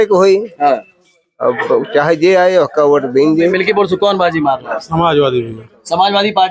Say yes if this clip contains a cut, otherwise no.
yes